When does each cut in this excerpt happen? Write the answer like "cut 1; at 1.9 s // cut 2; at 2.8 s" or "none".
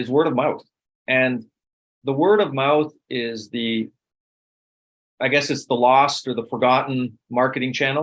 none